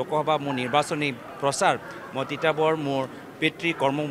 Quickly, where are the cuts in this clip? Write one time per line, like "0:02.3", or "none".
none